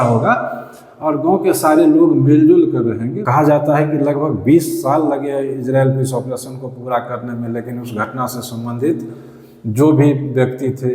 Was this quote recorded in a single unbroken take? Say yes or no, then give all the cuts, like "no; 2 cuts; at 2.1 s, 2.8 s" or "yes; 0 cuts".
no; 1 cut; at 3.1 s